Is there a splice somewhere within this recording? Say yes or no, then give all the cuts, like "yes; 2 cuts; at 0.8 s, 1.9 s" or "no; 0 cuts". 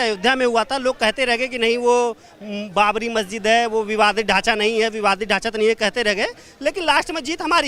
no; 0 cuts